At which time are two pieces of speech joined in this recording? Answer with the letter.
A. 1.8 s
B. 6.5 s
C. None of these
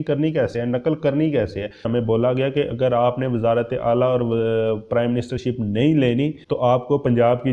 A